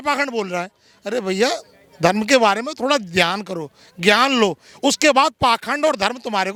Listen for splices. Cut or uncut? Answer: uncut